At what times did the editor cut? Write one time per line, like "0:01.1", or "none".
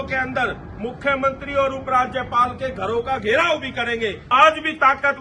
0:04.3